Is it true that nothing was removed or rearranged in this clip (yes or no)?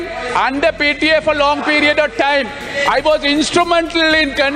yes